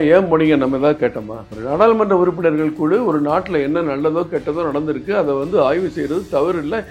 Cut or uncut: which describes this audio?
uncut